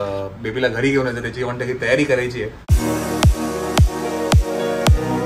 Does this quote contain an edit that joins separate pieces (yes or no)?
yes